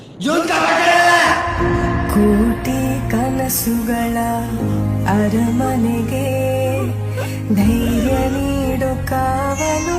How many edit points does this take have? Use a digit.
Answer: 0